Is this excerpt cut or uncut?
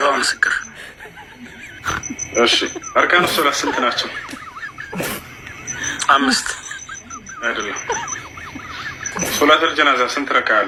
uncut